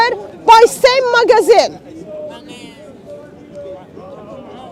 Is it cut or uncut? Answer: uncut